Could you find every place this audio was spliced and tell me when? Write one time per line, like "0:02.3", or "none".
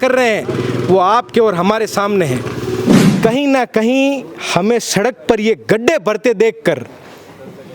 0:03.1

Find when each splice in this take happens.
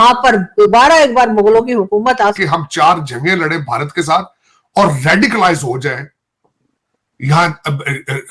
0:02.4

